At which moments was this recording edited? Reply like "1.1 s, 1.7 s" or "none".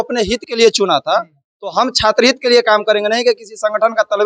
none

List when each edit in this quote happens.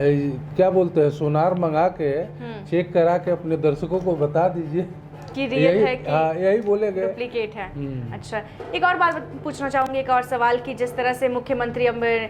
none

